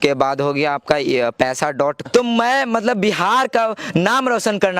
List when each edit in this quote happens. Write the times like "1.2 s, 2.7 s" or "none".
2.0 s

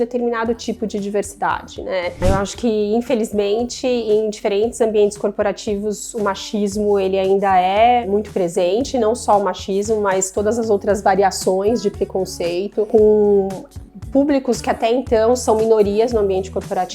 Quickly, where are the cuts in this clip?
2.2 s

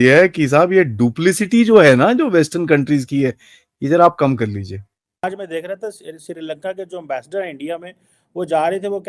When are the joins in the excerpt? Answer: 5.2 s

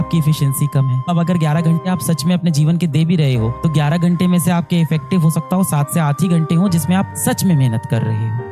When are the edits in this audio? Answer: 1.1 s

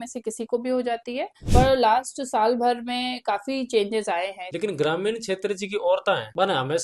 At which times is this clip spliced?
1.4 s, 4.4 s

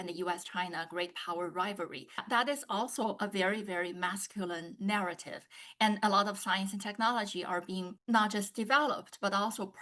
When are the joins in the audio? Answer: 2.2 s

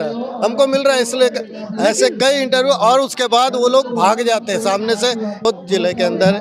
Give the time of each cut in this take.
5.4 s

